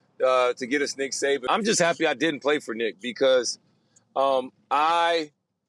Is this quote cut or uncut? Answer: cut